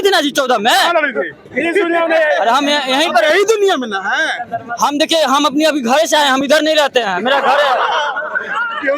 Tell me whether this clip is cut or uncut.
cut